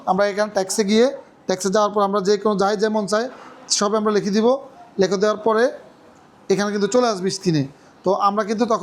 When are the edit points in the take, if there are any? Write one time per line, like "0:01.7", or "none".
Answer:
none